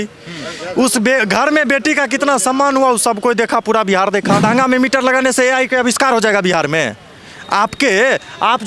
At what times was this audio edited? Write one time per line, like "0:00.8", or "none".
0:04.4